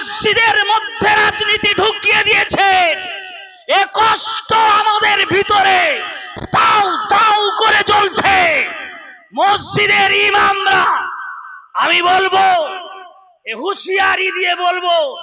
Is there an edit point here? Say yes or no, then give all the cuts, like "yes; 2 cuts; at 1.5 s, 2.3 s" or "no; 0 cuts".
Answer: no; 0 cuts